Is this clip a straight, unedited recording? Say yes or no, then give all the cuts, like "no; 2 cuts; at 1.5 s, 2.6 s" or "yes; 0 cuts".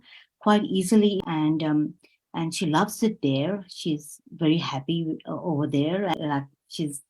no; 2 cuts; at 1.2 s, 6.1 s